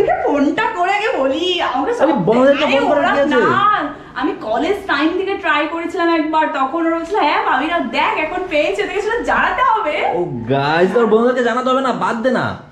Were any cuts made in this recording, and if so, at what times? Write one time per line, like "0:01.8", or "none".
none

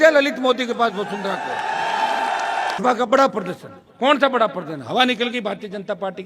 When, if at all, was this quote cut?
0:02.8

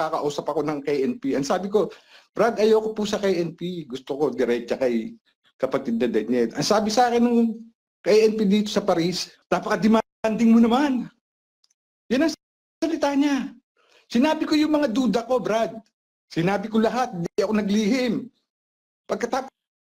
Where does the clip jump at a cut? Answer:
0:09.3

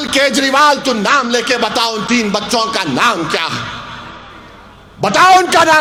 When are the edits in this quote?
none

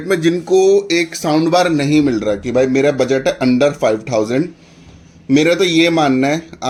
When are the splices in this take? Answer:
none

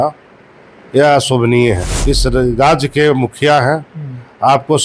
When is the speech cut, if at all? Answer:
0:01.9

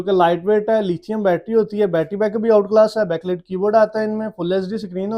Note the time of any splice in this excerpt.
none

